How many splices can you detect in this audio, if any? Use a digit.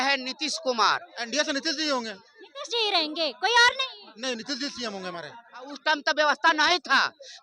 2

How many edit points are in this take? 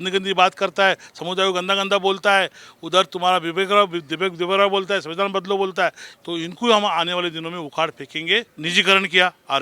2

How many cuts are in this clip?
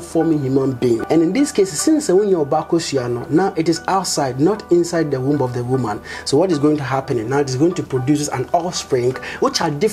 1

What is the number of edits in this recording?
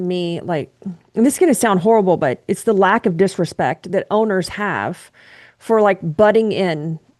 0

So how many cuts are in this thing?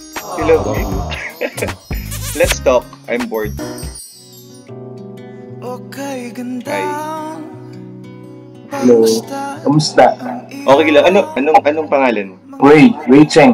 1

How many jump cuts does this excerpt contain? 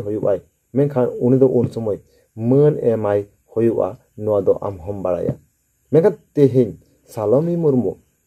0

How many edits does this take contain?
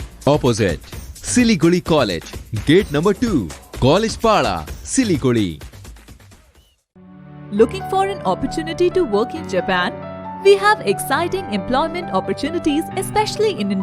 0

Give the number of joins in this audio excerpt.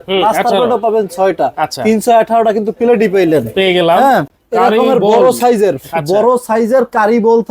1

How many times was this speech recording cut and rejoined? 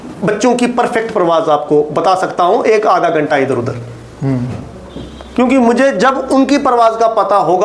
0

